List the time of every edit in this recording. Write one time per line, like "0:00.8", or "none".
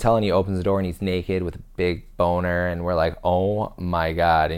none

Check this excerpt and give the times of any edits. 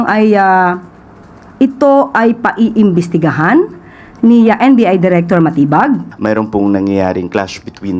0:06.1

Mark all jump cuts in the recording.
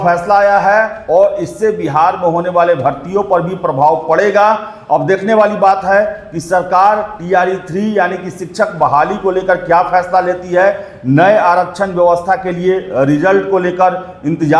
none

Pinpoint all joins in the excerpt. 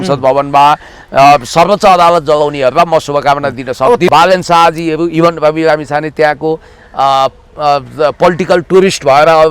0:04.1

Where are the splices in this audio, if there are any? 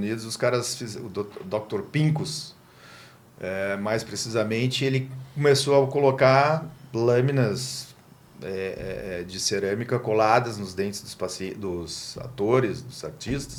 none

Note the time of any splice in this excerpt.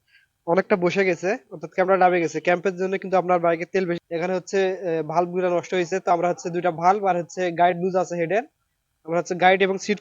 0:04.0

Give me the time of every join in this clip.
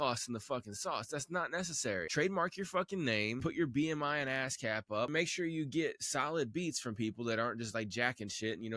0:02.1
0:03.4
0:05.1

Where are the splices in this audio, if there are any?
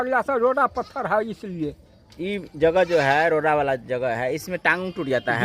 none

